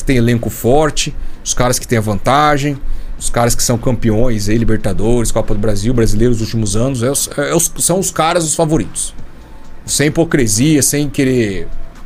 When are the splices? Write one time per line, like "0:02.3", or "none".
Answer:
none